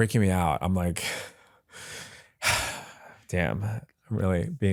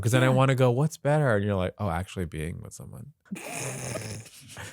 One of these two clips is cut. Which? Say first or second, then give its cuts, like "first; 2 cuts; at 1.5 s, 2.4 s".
second; 1 cut; at 3.1 s